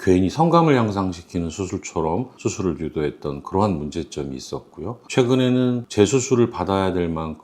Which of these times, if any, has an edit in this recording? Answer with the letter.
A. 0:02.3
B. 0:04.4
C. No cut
A